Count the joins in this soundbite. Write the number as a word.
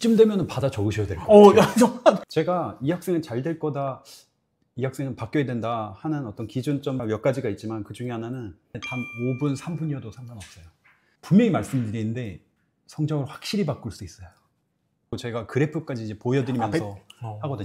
two